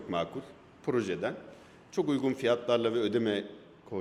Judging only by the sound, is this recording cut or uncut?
uncut